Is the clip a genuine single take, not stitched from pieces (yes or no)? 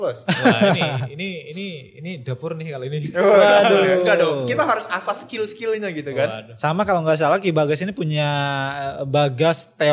yes